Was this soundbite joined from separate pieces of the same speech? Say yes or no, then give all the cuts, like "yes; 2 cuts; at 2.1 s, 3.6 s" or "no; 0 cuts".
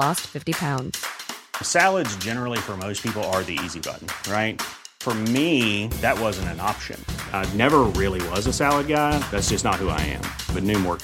no; 0 cuts